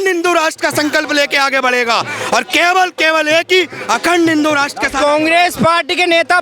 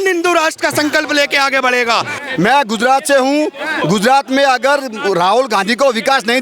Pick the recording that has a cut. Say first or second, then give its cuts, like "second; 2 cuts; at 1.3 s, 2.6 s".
second; 1 cut; at 2.1 s